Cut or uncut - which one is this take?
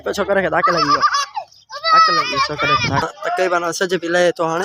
cut